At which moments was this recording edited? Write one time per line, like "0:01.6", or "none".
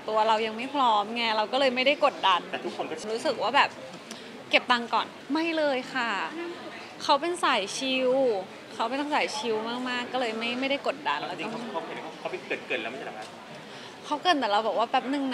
0:03.0
0:05.2